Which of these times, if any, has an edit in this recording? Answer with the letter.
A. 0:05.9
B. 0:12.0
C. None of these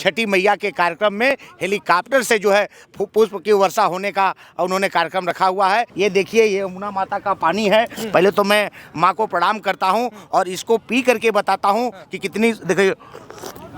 A